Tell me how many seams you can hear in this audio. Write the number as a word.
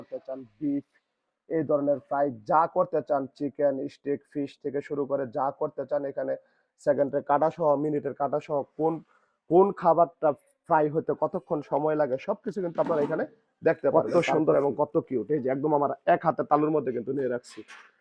one